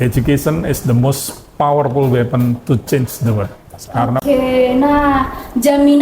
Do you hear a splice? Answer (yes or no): yes